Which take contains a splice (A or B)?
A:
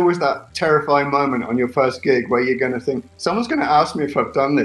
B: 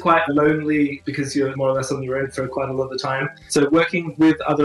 B